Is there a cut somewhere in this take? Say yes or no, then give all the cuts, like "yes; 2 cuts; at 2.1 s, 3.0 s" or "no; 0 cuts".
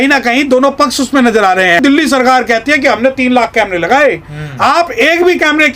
yes; 1 cut; at 1.8 s